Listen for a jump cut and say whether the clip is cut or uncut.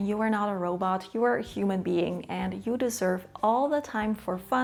uncut